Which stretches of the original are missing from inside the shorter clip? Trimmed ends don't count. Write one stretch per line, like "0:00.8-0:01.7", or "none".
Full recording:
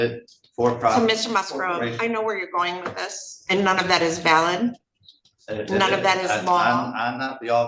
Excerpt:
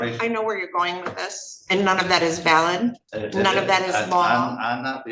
0:04.9-0:05.5